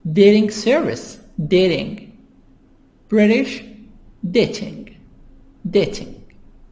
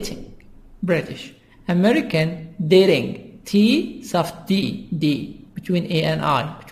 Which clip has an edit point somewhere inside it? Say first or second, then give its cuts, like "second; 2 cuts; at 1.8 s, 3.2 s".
second; 1 cut; at 2.1 s